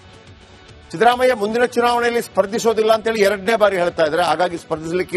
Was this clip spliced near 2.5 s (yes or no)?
no